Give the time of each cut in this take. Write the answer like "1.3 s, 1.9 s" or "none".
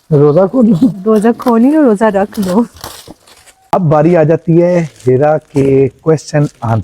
3.5 s